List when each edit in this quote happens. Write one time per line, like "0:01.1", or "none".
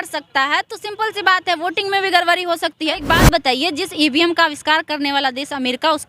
0:03.0